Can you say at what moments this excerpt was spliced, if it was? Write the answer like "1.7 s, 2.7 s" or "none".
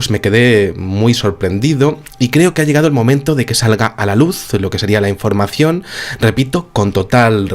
4.4 s